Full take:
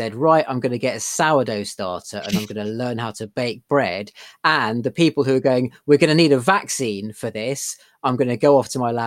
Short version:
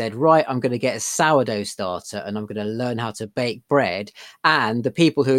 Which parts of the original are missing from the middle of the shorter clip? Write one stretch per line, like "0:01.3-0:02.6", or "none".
none